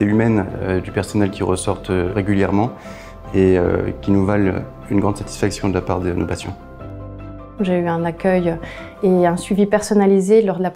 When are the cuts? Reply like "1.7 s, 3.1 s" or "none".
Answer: 2.1 s, 6.9 s